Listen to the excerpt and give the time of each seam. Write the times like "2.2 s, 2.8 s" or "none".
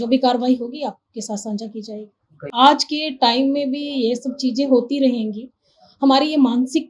2.5 s